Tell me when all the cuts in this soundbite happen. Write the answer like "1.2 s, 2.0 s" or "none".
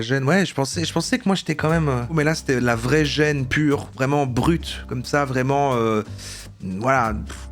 2.1 s